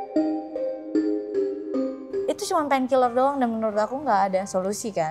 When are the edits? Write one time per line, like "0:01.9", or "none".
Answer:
0:02.2